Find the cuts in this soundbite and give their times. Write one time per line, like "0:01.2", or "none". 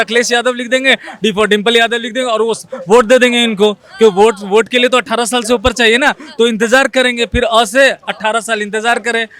none